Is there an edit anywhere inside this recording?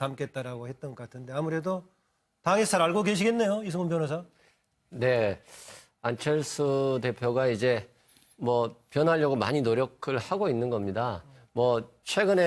yes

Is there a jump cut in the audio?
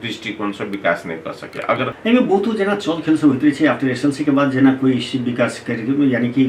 yes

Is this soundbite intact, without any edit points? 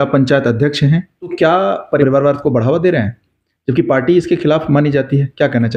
yes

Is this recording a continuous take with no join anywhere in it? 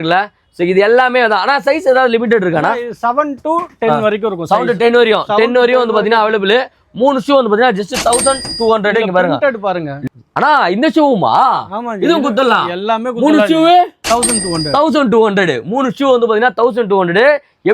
no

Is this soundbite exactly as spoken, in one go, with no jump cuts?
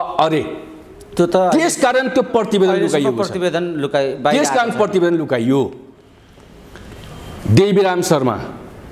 yes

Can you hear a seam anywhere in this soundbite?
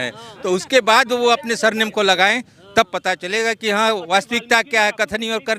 no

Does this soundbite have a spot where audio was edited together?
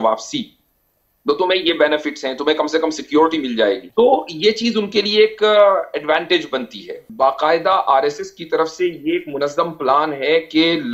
yes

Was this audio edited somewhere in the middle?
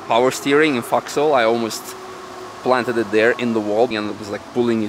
yes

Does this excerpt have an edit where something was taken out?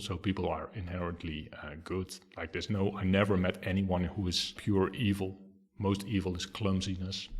yes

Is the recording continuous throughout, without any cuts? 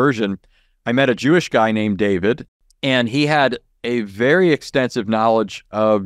no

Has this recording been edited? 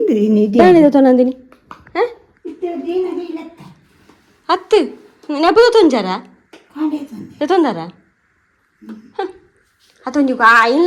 no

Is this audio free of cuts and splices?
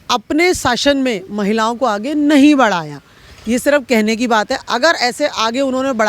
yes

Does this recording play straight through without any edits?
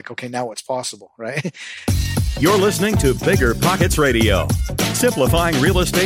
no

